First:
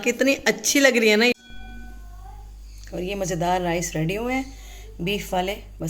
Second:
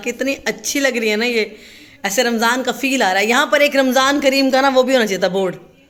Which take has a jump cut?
first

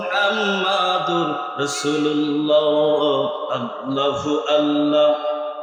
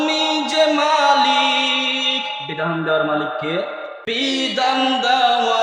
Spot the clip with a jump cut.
second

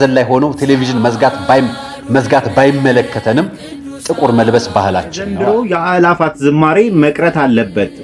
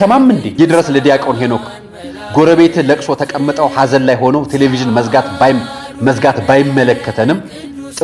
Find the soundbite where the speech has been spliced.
first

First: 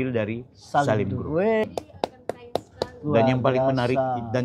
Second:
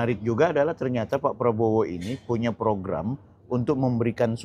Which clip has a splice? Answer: first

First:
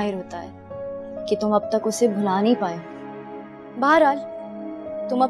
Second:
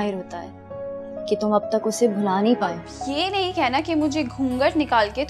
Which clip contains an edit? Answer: second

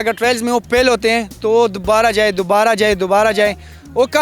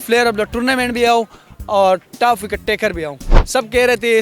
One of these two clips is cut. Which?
second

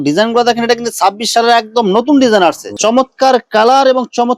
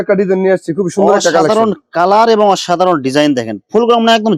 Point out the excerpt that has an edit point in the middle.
first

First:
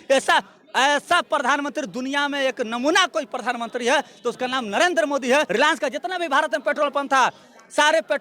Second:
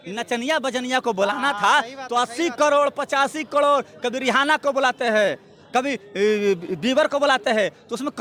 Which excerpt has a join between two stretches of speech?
first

